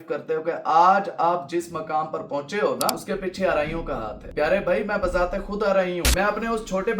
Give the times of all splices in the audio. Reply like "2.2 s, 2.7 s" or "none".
3.0 s, 4.2 s, 6.1 s